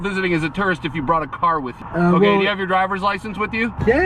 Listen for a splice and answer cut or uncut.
cut